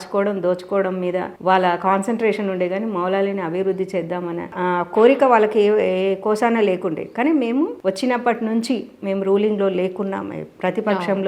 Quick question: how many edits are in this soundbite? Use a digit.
0